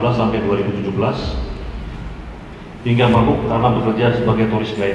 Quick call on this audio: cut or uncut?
uncut